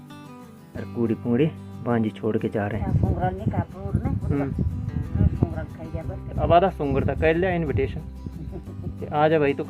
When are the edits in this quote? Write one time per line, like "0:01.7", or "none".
0:02.8

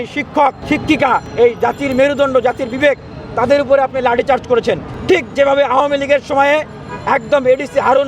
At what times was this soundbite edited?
0:01.1
0:04.9

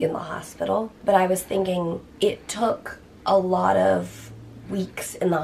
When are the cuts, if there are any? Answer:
0:01.0
0:02.1

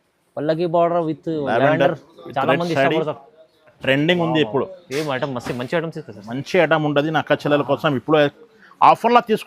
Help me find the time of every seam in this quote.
0:03.8

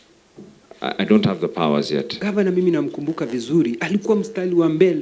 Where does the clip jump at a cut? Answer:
0:02.2

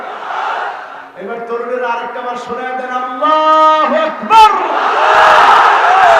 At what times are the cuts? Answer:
0:00.9

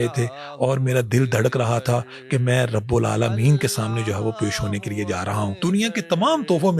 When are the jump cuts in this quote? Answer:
0:05.5

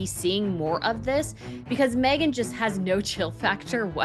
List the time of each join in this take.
none

